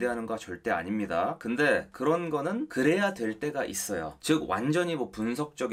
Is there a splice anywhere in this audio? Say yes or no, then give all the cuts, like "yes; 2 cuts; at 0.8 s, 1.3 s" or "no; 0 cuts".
yes; 2 cuts; at 1.4 s, 2.7 s